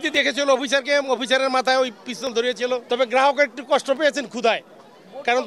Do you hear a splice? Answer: yes; 1 cut; at 2.8 s

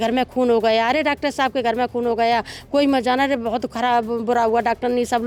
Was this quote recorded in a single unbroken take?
yes; 0 cuts

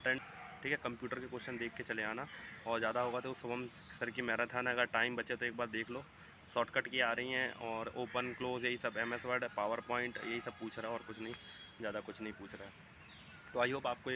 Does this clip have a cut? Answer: no; 0 cuts

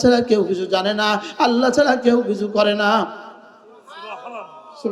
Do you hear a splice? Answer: no; 0 cuts

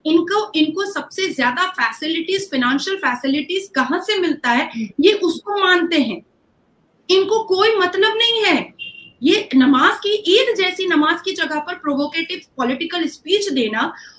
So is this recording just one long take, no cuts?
yes; 0 cuts

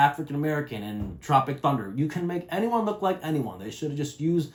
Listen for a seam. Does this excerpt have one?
no; 0 cuts

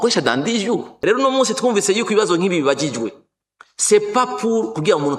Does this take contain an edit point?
yes; 1 cut; at 0.9 s

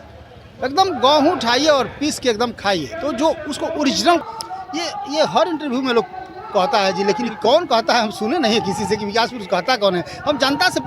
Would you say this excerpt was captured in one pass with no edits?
no; 1 cut; at 4.2 s

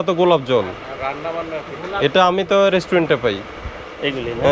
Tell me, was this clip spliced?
no; 0 cuts

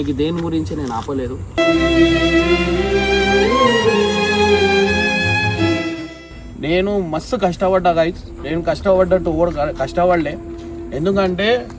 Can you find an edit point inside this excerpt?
yes; 1 cut; at 6.2 s

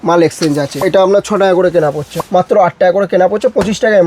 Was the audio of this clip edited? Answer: yes; 2 cuts; at 0.8 s, 2.1 s

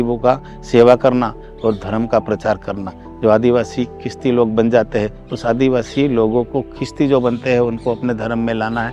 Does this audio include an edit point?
no; 0 cuts

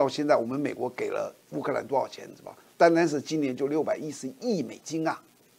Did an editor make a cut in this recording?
no; 0 cuts

